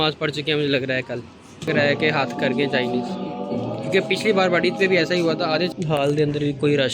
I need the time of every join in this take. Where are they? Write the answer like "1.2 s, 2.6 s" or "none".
1.7 s, 5.7 s